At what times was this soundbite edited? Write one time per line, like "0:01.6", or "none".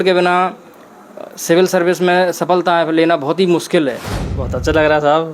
0:04.2